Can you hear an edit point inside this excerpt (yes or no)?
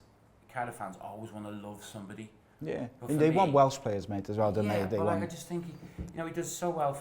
no